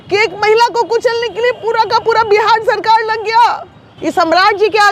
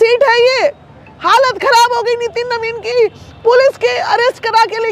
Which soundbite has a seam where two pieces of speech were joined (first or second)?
first